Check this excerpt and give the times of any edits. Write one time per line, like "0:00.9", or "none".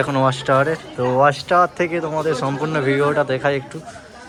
none